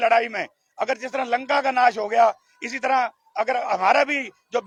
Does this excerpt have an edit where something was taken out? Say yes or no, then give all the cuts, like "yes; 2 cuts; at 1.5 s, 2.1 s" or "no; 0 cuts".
no; 0 cuts